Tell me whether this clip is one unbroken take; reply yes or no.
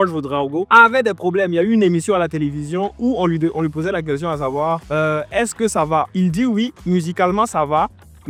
yes